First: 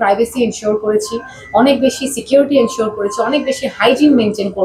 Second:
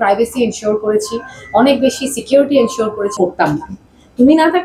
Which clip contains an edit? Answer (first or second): second